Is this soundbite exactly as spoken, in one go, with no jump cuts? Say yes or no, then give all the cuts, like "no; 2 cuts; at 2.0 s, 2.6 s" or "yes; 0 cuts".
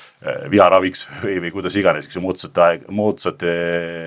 yes; 0 cuts